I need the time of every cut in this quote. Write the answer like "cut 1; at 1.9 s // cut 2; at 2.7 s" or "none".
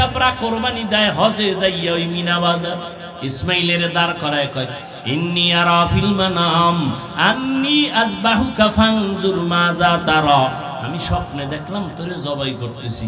cut 1; at 3.0 s // cut 2; at 4.8 s

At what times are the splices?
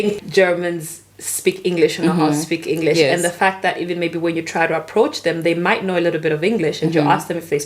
none

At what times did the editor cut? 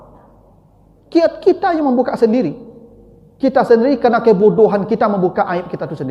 none

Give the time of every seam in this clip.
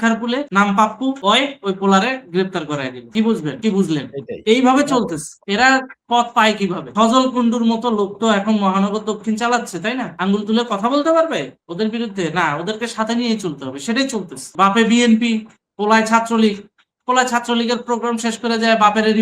cut 1; at 14.5 s

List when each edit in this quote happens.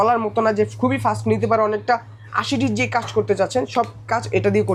none

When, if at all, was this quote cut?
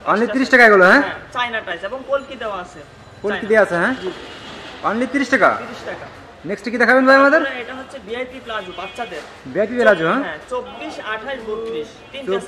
none

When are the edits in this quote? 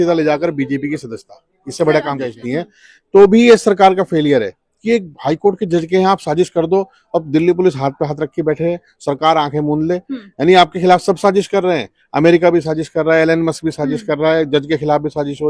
cut 1; at 2.3 s

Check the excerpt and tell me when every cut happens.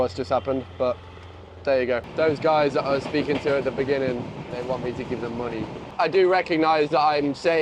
cut 1; at 2.1 s // cut 2; at 4.5 s // cut 3; at 5.8 s

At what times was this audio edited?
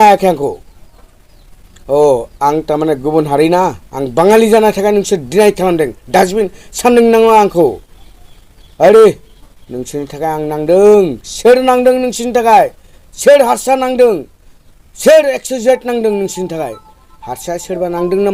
none

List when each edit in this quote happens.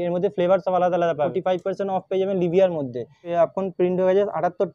cut 1; at 1.3 s // cut 2; at 3.3 s

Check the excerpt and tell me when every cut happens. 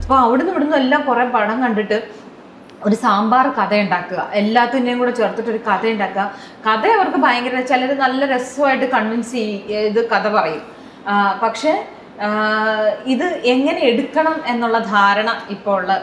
none

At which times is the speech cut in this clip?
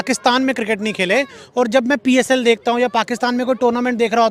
none

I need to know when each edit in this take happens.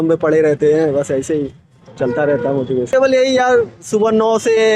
cut 1; at 2.9 s

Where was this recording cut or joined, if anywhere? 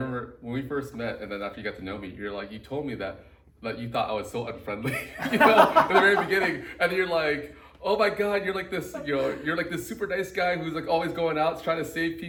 none

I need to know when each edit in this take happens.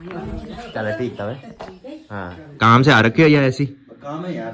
cut 1; at 2.5 s

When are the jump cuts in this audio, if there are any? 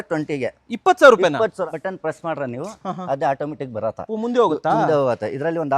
cut 1; at 1.7 s

